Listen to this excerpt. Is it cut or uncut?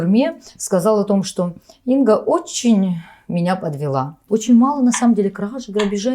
cut